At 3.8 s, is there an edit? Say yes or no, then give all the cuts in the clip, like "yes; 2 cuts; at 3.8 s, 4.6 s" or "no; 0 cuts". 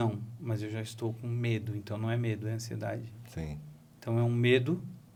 no; 0 cuts